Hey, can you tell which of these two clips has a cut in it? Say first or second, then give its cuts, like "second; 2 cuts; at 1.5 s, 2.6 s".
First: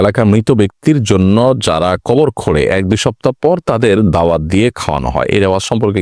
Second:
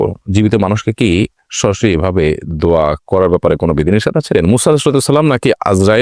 second; 1 cut; at 4.3 s